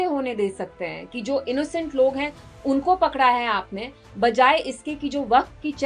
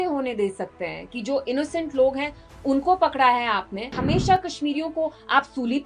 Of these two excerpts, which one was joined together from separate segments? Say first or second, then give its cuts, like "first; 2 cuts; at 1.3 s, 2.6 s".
second; 1 cut; at 3.9 s